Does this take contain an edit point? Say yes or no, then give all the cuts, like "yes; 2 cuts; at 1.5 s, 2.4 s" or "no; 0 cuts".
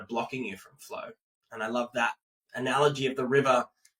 no; 0 cuts